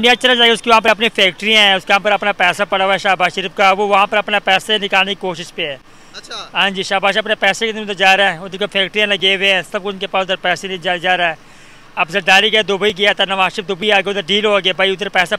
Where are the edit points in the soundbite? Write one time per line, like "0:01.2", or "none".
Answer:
none